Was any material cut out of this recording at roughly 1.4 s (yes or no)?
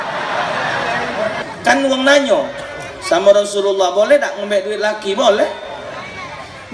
yes